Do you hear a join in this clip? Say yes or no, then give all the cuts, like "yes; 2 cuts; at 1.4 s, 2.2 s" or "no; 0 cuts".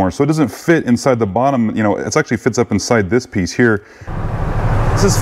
yes; 1 cut; at 4.1 s